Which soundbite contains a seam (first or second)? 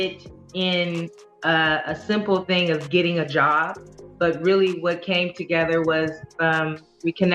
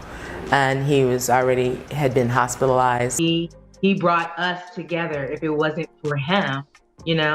second